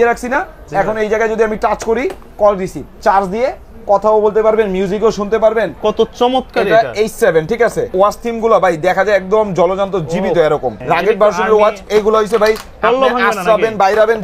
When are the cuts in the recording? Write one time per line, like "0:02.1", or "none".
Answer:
0:02.8
0:05.8
0:07.9
0:10.7